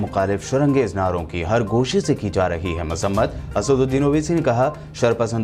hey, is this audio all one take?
yes; 0 cuts

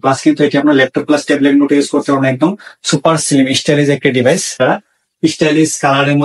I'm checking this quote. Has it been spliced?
yes; 1 cut; at 4.5 s

